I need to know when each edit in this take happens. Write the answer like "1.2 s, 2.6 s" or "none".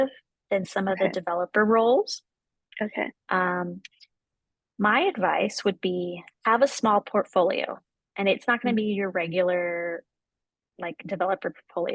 none